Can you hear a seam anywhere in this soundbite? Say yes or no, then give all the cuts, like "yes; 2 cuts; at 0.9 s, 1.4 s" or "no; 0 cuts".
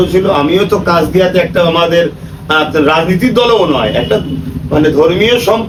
no; 0 cuts